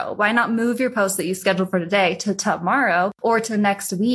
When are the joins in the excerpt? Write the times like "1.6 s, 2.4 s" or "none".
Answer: 3.1 s